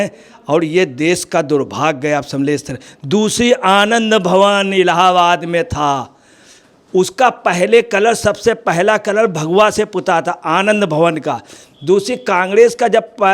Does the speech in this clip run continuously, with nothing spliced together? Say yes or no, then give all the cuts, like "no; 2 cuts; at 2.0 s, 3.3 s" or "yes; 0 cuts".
yes; 0 cuts